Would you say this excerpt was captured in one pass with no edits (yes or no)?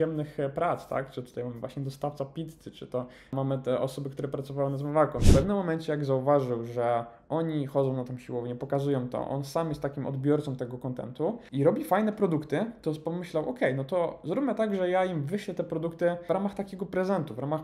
no